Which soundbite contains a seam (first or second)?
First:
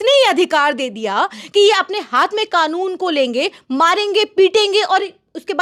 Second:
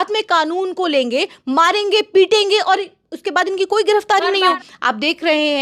second